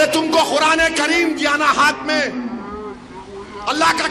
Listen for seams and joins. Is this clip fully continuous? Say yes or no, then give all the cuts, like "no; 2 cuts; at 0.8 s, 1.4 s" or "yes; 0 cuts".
yes; 0 cuts